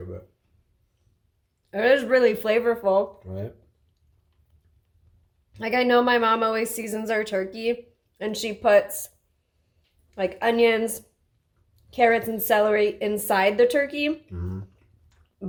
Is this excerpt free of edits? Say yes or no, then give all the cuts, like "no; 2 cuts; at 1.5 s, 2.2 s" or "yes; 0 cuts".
yes; 0 cuts